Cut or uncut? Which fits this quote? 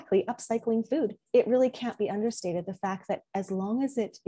cut